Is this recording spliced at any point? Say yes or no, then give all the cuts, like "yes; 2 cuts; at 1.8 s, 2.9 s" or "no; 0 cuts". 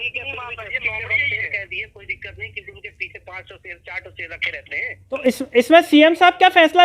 yes; 1 cut; at 5.2 s